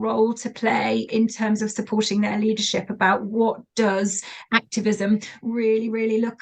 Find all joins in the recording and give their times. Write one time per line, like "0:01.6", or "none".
0:04.3